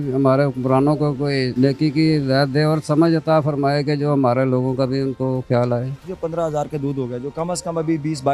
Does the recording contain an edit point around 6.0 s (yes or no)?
yes